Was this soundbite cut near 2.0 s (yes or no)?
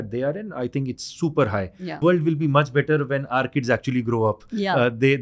yes